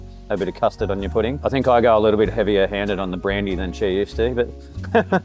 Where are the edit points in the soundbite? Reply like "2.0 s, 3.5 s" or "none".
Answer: 1.4 s